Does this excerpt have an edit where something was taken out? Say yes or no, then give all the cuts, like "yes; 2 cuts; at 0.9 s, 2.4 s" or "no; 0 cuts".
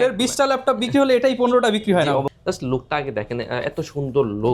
yes; 1 cut; at 2.3 s